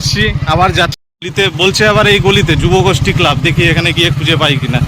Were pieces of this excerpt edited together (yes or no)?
yes